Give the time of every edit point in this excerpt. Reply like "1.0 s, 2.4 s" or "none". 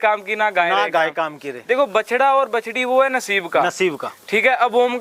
none